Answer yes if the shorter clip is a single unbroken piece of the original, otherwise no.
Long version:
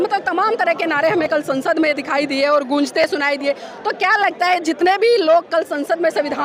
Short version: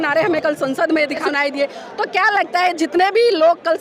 no